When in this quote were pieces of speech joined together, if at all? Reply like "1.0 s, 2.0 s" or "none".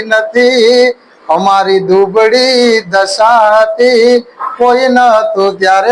none